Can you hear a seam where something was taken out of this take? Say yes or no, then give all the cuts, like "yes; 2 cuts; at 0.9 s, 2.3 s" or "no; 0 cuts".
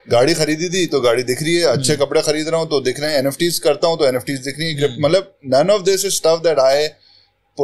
no; 0 cuts